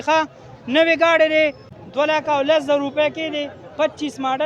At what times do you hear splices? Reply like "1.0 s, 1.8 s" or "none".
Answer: 2.1 s